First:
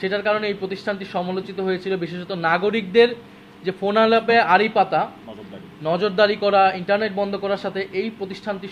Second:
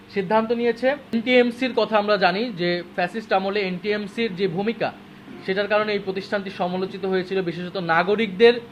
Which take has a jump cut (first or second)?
second